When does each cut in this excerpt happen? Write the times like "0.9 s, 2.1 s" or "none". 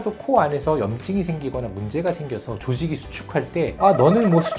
none